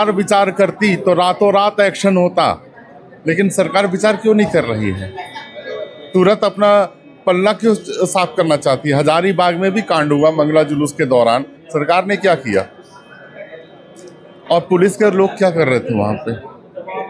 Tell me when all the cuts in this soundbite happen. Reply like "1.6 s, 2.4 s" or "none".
none